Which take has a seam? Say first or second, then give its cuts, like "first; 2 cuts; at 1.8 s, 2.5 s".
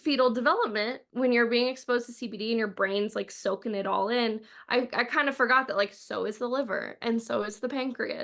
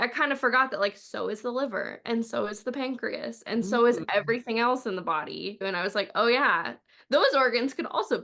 second; 2 cuts; at 5.6 s, 6.8 s